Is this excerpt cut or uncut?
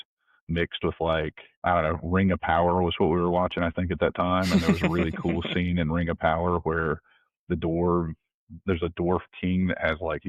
cut